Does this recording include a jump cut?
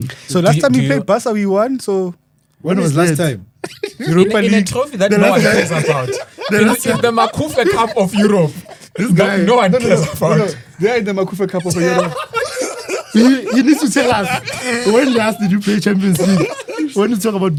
no; 0 cuts

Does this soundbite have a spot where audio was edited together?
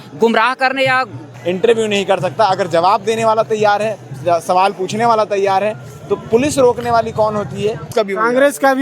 yes; 2 cuts; at 1.3 s, 7.9 s

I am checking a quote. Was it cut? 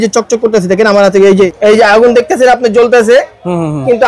yes; 1 cut; at 1.5 s

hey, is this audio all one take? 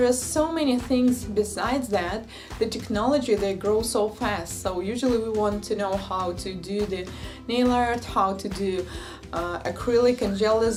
yes; 0 cuts

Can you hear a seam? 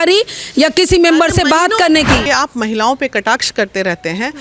yes; 1 cut; at 2.2 s

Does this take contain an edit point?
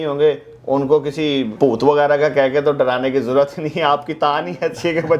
yes; 1 cut; at 1.5 s

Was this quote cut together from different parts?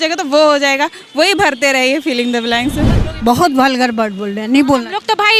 yes; 1 cut; at 3.0 s

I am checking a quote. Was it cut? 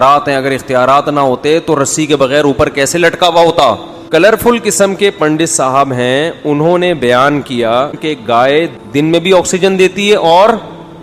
yes; 2 cuts; at 3.9 s, 8.5 s

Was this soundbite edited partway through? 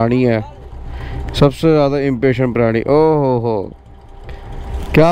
no; 0 cuts

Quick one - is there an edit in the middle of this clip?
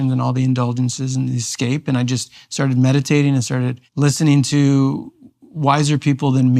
yes; 1 cut; at 3.8 s

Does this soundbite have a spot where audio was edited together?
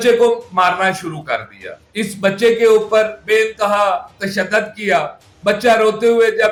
no; 0 cuts

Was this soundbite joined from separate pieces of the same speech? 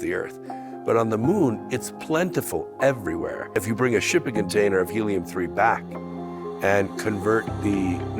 yes; 1 cut; at 3.6 s

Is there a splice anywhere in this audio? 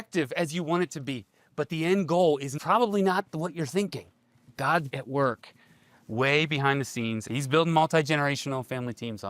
yes; 3 cuts; at 2.5 s, 5.0 s, 7.2 s

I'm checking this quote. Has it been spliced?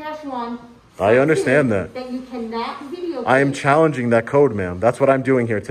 no; 0 cuts

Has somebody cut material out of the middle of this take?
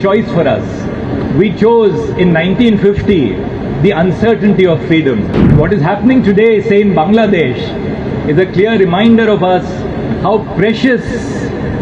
yes; 1 cut; at 5.5 s

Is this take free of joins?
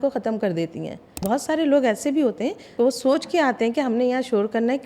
no; 2 cuts; at 1.2 s, 2.7 s

